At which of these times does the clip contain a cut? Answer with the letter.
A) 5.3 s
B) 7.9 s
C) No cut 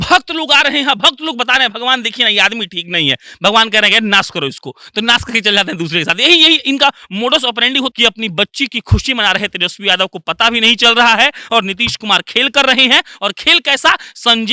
B